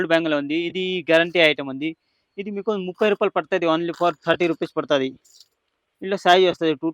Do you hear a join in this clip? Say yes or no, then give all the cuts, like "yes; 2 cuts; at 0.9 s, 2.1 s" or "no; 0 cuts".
no; 0 cuts